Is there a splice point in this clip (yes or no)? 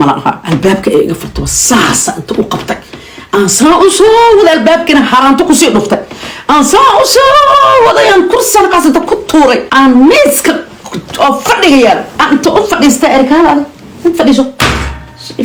no